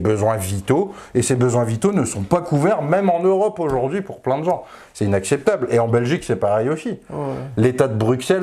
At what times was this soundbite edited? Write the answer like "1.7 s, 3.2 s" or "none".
none